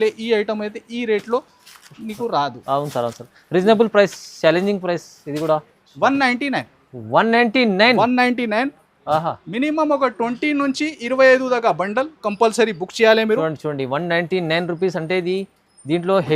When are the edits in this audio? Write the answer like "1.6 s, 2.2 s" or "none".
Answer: 5.7 s